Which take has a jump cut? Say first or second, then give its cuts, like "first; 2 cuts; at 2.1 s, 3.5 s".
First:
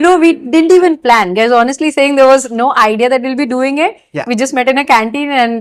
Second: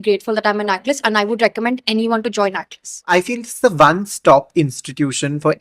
second; 1 cut; at 3.1 s